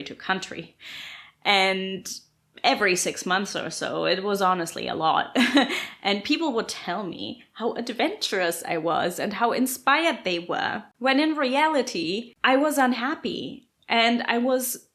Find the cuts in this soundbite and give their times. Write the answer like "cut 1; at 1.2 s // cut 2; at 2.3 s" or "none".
cut 1; at 10.9 s // cut 2; at 12.3 s